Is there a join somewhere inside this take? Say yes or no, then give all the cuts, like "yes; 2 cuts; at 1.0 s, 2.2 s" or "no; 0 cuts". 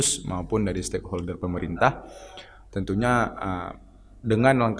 no; 0 cuts